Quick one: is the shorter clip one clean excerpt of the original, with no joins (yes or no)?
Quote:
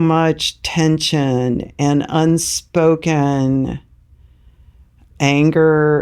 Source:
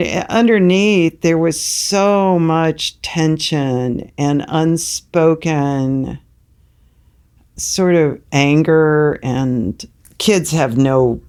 no